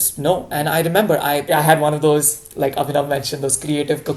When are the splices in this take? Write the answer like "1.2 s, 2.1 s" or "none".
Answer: 1.4 s